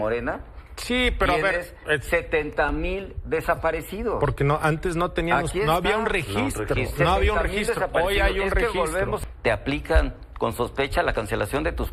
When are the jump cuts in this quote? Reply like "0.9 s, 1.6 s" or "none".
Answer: 9.2 s